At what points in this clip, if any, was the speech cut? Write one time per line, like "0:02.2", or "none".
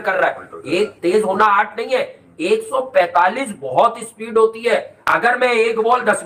none